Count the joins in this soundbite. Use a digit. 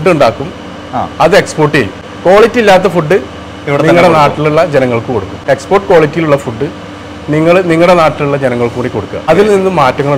3